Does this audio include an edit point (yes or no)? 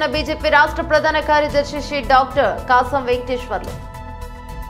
yes